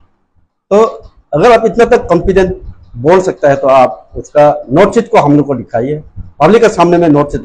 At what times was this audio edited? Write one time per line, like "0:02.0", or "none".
none